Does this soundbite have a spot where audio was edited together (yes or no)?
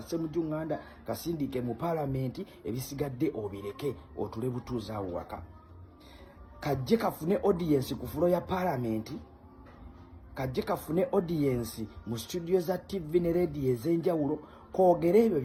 no